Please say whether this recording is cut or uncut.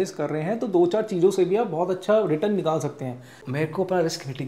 cut